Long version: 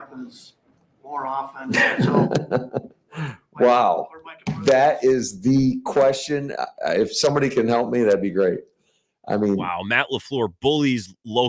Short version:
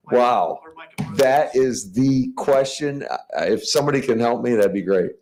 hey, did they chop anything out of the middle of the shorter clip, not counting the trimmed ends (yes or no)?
no